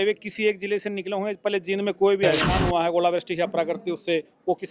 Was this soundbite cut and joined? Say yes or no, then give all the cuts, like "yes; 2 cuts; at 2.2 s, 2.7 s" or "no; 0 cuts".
yes; 1 cut; at 2.5 s